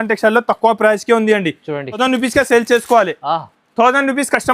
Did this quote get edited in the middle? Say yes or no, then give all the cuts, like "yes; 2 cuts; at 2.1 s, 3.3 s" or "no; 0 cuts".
yes; 1 cut; at 2.0 s